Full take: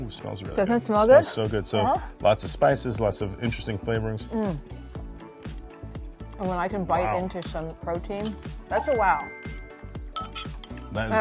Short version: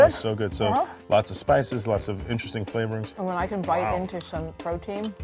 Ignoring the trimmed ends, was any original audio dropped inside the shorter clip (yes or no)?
yes